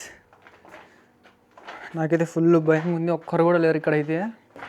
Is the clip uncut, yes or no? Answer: yes